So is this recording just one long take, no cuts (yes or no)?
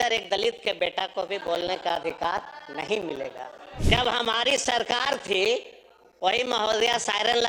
no